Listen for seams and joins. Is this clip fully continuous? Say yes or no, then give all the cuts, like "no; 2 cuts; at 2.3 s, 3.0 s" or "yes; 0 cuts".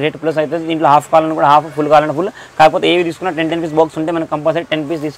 yes; 0 cuts